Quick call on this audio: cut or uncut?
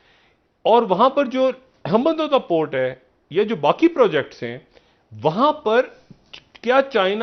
uncut